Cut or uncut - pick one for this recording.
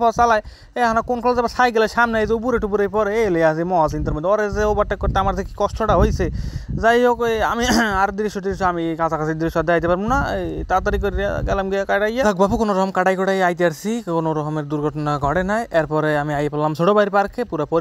uncut